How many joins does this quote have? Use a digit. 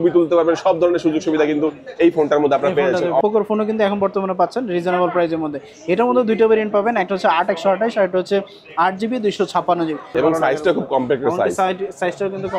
2